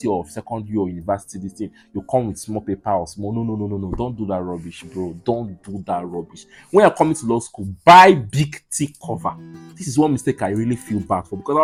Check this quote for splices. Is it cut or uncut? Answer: uncut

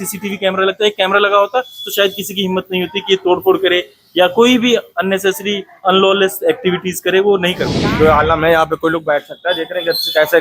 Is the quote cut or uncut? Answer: cut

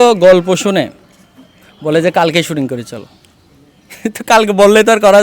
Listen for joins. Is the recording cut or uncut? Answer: uncut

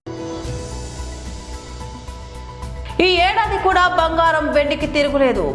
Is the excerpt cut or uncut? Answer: uncut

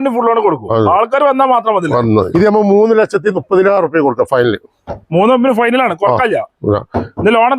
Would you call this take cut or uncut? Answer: cut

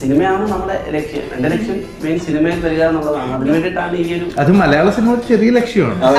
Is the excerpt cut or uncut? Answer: uncut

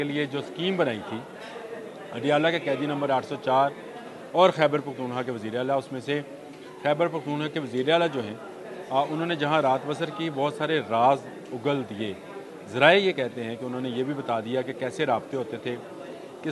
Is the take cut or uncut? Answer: uncut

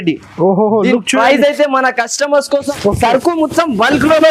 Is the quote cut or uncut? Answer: cut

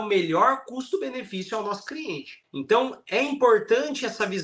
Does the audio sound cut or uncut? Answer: cut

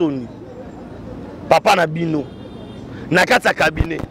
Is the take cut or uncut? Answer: uncut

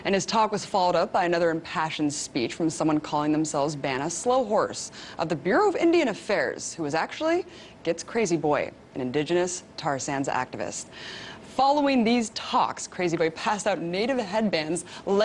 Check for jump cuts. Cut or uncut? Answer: uncut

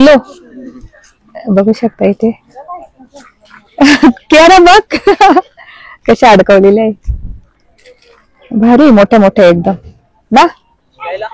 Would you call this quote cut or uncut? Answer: uncut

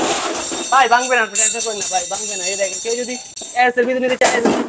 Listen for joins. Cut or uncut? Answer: uncut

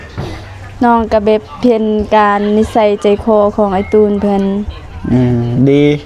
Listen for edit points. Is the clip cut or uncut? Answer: uncut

